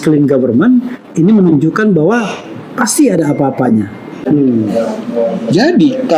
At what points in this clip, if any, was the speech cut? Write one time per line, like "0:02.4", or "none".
0:04.2

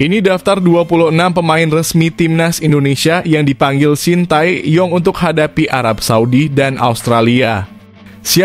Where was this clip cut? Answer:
none

